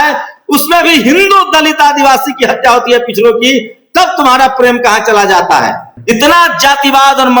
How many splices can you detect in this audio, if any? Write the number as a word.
one